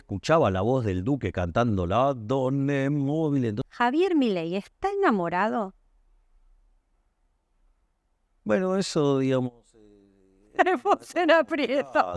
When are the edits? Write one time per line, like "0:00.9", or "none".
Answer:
0:03.6